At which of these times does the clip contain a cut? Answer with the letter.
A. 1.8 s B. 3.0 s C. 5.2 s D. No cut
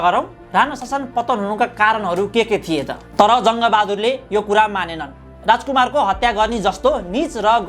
B